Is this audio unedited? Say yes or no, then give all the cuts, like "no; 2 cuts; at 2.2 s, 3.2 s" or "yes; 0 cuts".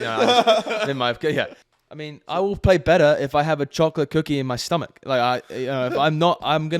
no; 1 cut; at 1.6 s